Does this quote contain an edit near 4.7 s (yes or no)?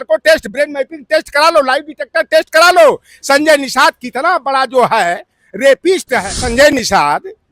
no